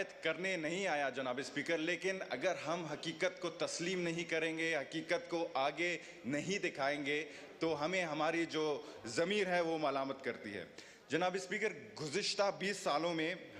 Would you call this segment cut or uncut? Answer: uncut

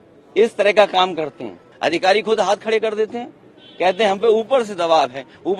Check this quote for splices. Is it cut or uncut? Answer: cut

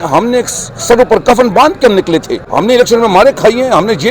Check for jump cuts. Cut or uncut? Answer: cut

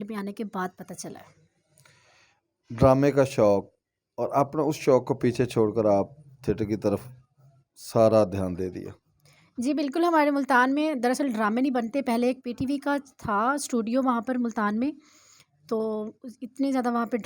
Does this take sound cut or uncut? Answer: uncut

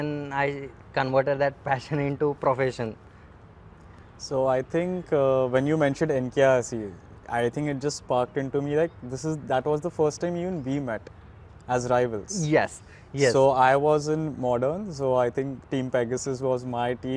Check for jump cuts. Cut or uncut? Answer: uncut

